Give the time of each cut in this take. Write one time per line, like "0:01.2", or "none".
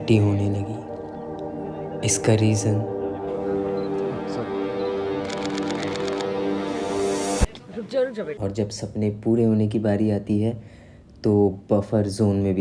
0:08.3